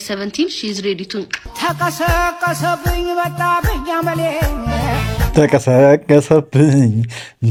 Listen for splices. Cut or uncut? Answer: uncut